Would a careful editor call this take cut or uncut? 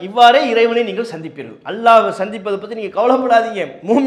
uncut